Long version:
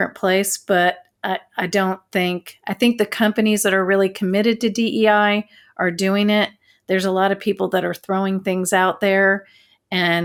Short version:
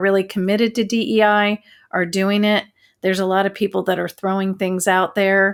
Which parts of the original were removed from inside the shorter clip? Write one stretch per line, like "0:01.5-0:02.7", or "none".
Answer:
none